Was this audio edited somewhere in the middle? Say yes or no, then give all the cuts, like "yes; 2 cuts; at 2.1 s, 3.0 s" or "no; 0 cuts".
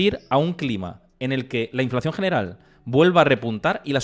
no; 0 cuts